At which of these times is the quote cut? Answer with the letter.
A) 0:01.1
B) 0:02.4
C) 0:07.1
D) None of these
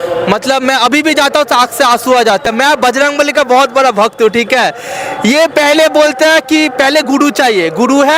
B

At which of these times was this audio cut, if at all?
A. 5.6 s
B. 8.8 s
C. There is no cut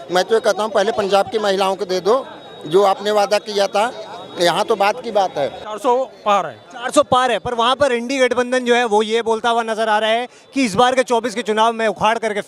A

